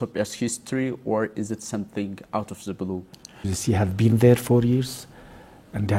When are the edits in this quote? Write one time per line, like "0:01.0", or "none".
0:03.3